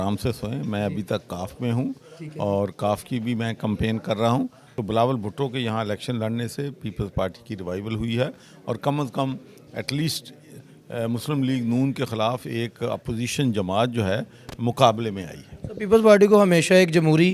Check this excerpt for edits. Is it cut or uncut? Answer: cut